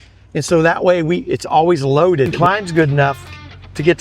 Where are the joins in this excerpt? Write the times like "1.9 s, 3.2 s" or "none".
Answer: 2.3 s